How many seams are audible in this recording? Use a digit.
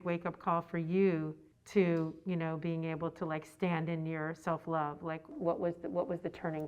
1